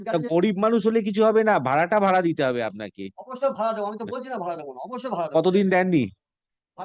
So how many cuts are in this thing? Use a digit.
0